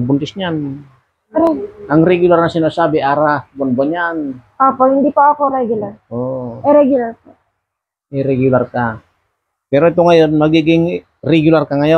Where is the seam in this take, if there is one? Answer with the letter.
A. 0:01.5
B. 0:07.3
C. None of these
C